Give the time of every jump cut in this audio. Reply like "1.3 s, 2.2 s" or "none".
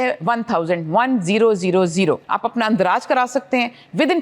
2.3 s